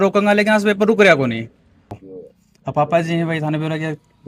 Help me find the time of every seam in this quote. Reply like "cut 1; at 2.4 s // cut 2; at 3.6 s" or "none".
cut 1; at 1.9 s

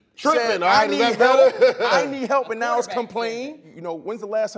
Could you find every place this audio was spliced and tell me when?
cut 1; at 3.6 s

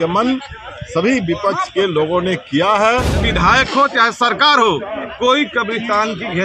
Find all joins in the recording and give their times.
cut 1; at 3.2 s

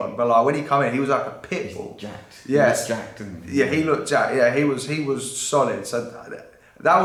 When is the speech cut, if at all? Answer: none

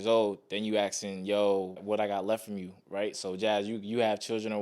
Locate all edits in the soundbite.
cut 1; at 1.8 s

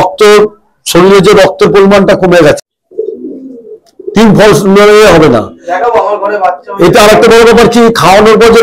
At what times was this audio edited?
cut 1; at 2.6 s

